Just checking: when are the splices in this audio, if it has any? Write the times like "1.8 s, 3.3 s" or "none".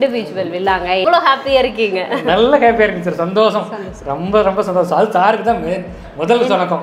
1.0 s

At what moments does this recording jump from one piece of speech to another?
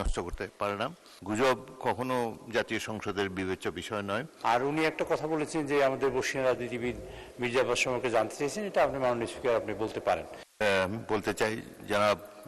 1.1 s, 4.3 s, 10.4 s

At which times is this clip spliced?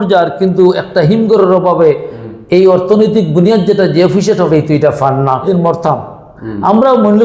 5.4 s

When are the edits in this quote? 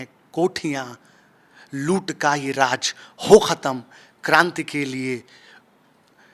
none

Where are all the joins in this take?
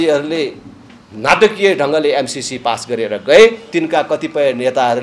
3.6 s

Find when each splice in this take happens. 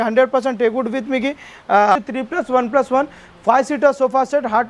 2.0 s

